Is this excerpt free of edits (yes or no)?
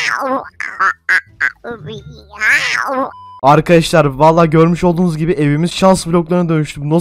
no